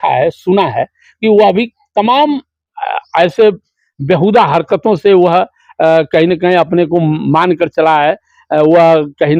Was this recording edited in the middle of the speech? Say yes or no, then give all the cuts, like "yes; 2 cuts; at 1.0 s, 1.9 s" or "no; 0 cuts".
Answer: no; 0 cuts